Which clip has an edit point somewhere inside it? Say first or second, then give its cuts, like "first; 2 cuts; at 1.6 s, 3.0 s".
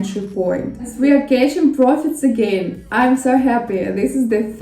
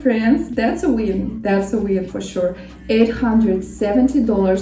first; 1 cut; at 0.9 s